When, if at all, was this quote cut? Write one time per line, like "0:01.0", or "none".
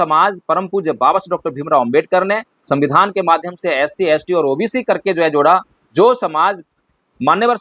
none